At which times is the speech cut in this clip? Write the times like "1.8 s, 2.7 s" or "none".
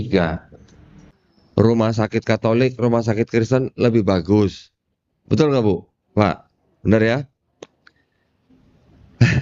1.5 s